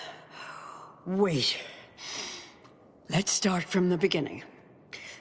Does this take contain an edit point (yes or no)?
no